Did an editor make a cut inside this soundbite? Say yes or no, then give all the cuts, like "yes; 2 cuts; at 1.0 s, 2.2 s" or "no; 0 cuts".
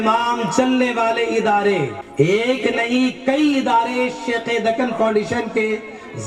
yes; 1 cut; at 2.0 s